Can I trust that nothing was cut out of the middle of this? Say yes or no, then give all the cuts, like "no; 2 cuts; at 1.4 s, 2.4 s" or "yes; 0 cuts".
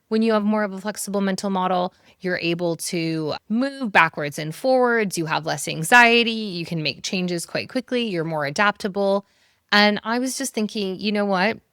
yes; 0 cuts